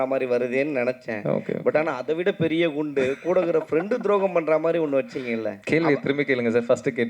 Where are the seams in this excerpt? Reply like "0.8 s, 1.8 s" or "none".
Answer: 5.5 s